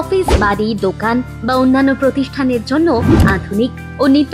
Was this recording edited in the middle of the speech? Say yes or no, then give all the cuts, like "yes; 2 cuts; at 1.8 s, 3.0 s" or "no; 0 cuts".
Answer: no; 0 cuts